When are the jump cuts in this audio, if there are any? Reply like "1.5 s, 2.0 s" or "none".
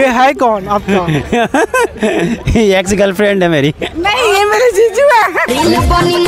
3.8 s, 5.5 s